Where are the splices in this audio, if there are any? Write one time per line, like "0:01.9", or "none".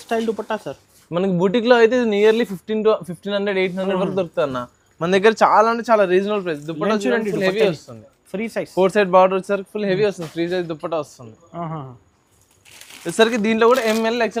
none